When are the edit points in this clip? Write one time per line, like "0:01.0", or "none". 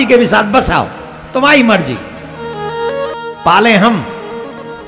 0:03.1